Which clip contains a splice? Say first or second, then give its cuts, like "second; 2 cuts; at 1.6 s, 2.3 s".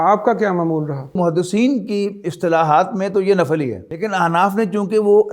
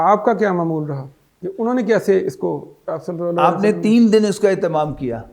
first; 2 cuts; at 1.2 s, 3.8 s